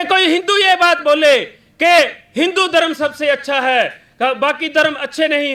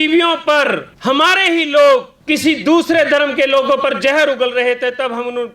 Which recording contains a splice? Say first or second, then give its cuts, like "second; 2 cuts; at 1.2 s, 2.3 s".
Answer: second; 2 cuts; at 0.9 s, 2.1 s